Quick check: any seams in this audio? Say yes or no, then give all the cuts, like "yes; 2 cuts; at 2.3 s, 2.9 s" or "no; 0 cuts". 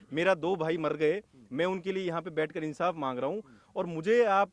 no; 0 cuts